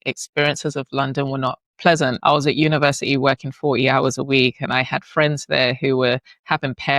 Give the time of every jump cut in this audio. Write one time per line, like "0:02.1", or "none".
0:02.2